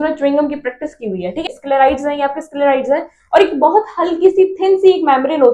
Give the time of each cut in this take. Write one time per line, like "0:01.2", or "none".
0:01.4